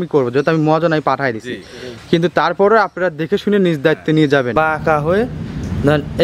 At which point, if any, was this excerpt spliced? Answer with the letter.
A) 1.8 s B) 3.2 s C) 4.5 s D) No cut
C